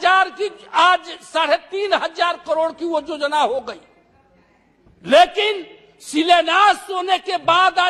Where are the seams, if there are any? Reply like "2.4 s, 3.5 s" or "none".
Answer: none